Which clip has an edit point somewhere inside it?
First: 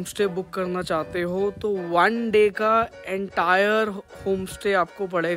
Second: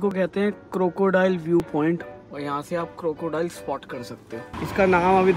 second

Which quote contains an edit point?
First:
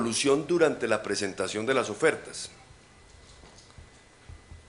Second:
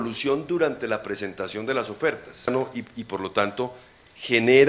first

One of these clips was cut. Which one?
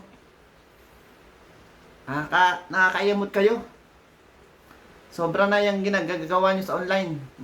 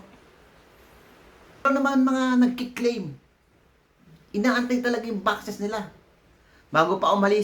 second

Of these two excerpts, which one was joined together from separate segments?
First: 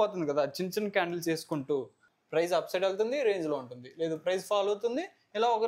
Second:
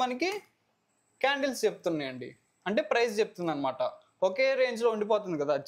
first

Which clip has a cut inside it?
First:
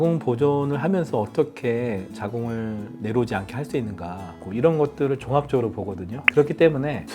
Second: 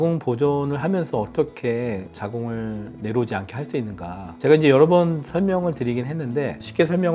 first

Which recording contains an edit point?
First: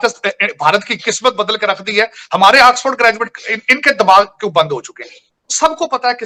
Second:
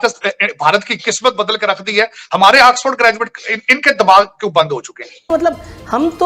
second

